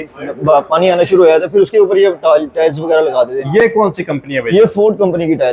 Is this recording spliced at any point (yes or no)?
no